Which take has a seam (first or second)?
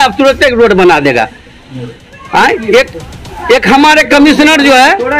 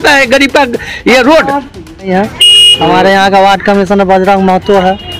second